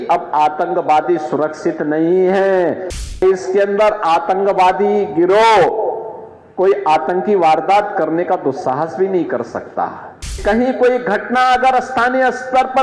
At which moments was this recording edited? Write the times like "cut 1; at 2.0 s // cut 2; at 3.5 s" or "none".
cut 1; at 3.1 s // cut 2; at 10.4 s